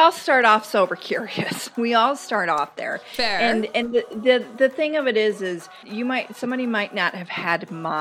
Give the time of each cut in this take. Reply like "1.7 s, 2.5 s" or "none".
5.8 s